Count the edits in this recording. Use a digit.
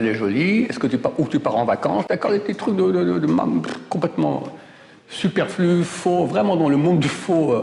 0